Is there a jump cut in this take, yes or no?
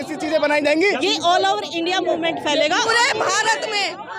yes